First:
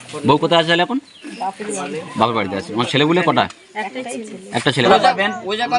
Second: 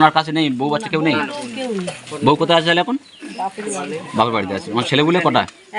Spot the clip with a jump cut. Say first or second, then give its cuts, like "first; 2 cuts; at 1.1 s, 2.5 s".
first; 1 cut; at 4.8 s